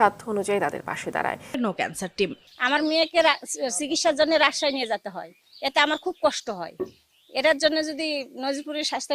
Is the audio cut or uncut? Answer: cut